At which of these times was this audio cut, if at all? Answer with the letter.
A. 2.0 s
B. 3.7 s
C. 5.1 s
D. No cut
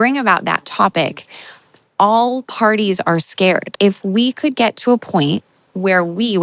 B